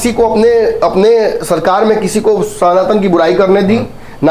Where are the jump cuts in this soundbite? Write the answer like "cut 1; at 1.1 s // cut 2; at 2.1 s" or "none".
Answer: none